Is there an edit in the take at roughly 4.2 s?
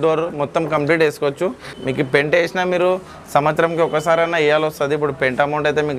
no; 1 cut; at 1.7 s

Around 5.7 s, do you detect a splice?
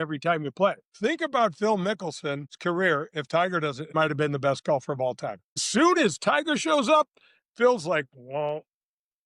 yes; 4 cuts; at 0.9 s, 2.5 s, 3.9 s, 5.7 s

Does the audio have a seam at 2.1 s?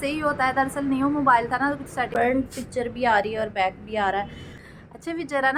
yes; 2 cuts; at 2.1 s, 4.6 s

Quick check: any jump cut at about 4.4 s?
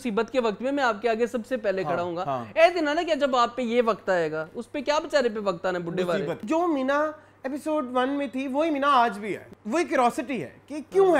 no; 2 cuts; at 6.4 s, 9.5 s

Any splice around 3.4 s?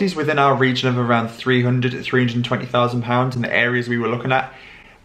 no; 0 cuts

